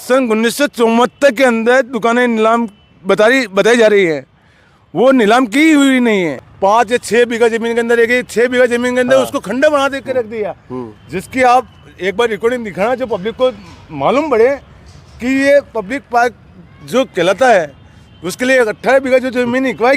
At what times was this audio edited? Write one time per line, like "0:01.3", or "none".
0:06.4